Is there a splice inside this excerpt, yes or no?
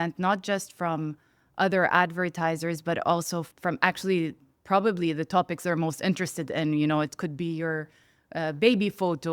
yes